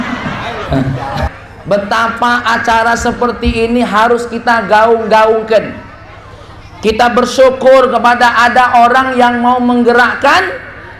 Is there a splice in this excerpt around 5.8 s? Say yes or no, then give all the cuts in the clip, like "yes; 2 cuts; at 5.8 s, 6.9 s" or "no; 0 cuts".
no; 1 cut; at 1.3 s